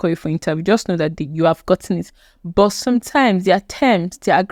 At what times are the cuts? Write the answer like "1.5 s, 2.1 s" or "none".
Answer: none